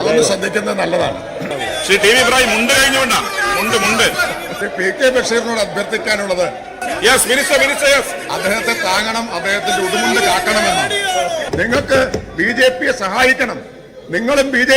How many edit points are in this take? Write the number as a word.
three